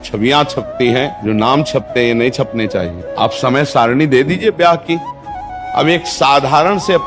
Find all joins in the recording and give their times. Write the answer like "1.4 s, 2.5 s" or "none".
1.1 s, 3.0 s, 5.5 s